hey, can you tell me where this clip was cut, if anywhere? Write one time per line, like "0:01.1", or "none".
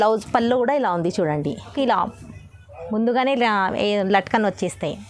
0:01.7